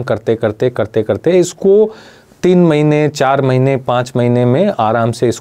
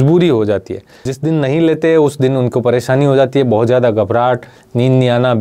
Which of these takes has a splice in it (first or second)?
second